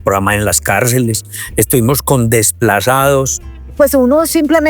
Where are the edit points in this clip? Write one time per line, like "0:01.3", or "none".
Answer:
0:03.6